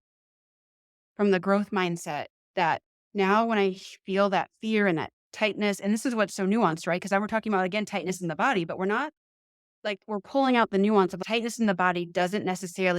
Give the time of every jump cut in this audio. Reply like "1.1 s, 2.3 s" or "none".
11.2 s